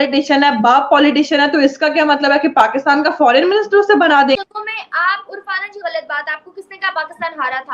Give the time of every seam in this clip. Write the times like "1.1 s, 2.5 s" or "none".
4.4 s